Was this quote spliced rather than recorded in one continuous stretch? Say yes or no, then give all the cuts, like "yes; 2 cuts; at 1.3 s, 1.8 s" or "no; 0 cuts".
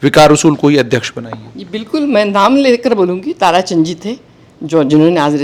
no; 0 cuts